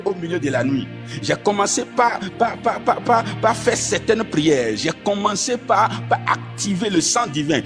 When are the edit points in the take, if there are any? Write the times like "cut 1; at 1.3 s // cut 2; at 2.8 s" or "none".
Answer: none

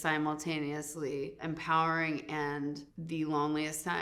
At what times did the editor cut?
none

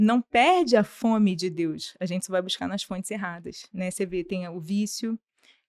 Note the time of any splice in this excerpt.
none

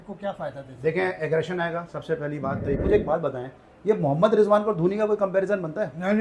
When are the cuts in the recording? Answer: cut 1; at 2.8 s

